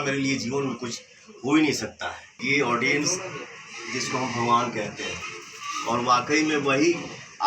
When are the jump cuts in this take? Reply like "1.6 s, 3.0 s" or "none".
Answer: 2.4 s